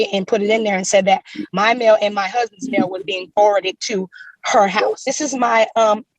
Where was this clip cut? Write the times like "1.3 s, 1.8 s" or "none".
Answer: 1.4 s, 5.0 s